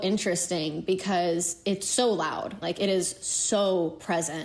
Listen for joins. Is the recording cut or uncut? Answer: cut